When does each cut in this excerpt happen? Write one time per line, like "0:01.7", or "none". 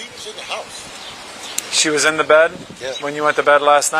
0:01.6